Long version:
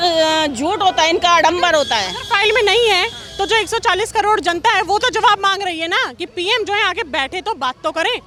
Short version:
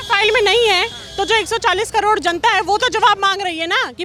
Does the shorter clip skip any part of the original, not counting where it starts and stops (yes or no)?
no